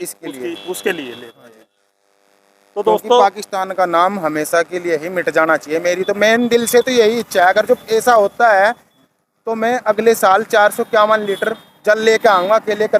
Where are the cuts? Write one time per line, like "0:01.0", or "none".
none

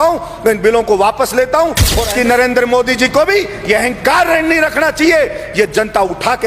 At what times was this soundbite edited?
0:02.0

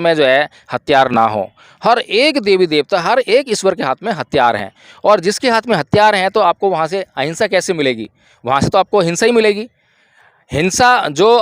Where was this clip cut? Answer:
none

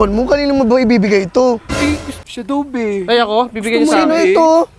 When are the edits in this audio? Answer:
0:02.2

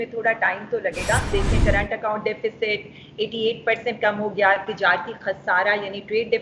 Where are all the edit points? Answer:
0:01.3

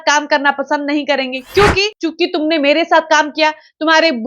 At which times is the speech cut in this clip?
0:01.5

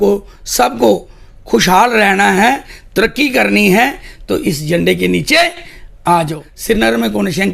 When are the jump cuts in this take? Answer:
0:06.5

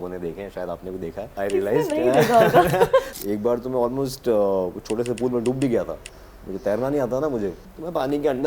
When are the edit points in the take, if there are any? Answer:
0:01.3
0:03.1
0:07.6

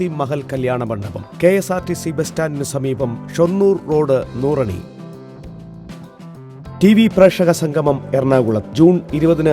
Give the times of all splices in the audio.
0:05.3
0:06.8

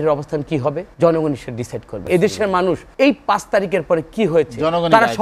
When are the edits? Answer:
0:00.9
0:02.0
0:02.9

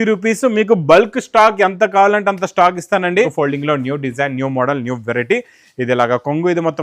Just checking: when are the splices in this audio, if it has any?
0:03.3

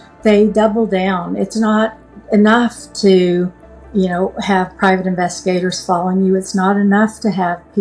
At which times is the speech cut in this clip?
none

